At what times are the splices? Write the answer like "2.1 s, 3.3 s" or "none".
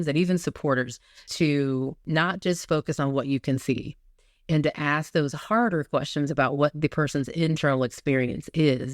1.3 s